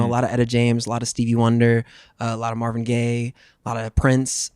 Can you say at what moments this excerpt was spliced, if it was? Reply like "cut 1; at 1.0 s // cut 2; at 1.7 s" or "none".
none